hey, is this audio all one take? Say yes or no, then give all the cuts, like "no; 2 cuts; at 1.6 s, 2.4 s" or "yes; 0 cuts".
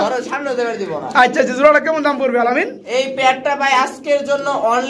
yes; 0 cuts